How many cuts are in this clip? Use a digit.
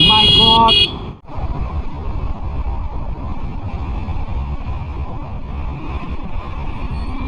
0